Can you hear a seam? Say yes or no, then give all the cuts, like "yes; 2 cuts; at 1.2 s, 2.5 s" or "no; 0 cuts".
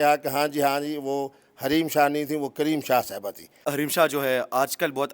yes; 1 cut; at 3.6 s